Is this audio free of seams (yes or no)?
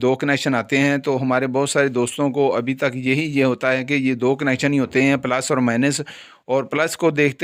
yes